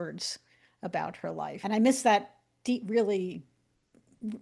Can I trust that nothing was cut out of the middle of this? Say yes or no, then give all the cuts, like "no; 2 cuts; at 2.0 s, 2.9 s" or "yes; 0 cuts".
no; 1 cut; at 1.6 s